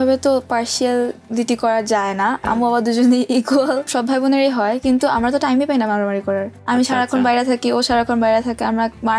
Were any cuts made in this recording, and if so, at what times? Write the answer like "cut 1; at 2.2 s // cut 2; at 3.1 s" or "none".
cut 1; at 2.4 s // cut 2; at 3.9 s // cut 3; at 6.5 s